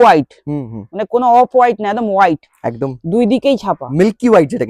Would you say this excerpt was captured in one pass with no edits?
yes; 0 cuts

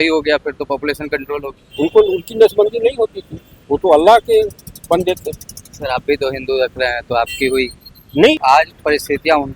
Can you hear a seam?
yes; 2 cuts; at 1.6 s, 8.4 s

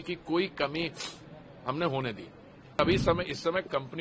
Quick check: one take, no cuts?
no; 1 cut; at 2.8 s

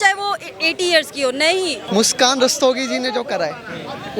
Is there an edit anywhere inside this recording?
yes; 1 cut; at 1.8 s

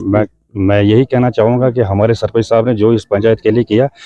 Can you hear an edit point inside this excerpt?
no; 0 cuts

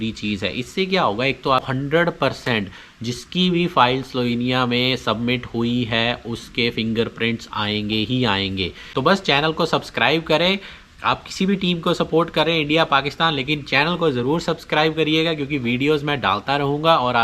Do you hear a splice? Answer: yes; 2 cuts; at 1.7 s, 8.9 s

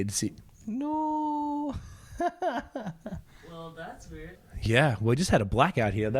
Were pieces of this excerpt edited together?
yes; 1 cut; at 4.4 s

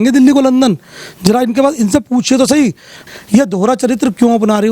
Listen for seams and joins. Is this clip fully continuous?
no; 1 cut; at 3.0 s

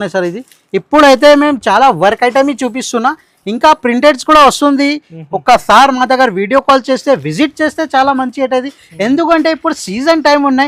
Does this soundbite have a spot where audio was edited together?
no; 0 cuts

